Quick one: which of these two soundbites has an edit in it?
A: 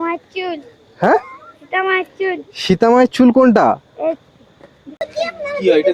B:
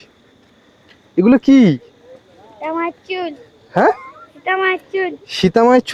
A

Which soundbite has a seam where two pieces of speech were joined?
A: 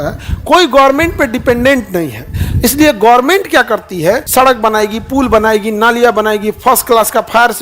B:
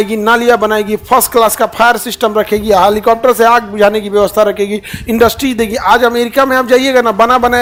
A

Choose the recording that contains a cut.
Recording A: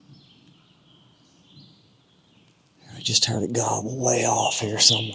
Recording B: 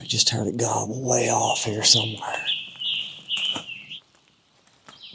B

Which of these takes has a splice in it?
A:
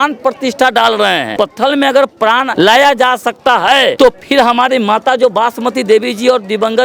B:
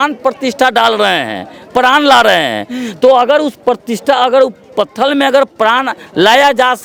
A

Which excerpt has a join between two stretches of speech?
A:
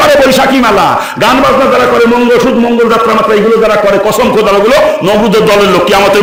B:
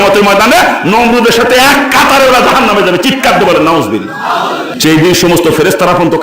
B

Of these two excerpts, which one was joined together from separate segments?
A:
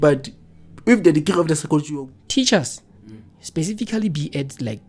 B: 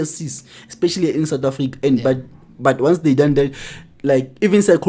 A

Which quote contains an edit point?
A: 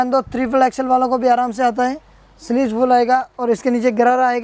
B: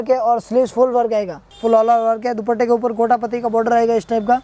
B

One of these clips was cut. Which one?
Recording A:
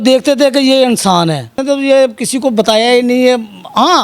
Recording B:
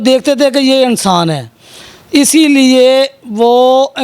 A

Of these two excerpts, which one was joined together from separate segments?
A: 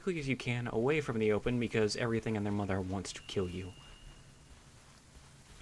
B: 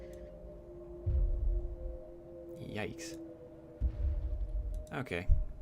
B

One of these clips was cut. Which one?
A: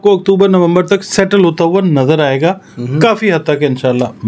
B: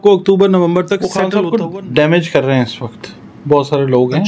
B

